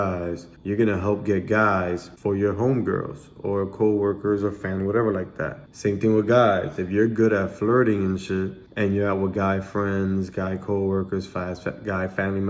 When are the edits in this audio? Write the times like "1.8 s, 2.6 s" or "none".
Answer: none